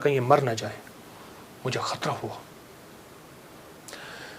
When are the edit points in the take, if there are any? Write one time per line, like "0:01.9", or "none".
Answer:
none